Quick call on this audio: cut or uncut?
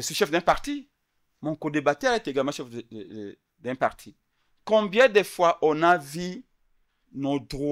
uncut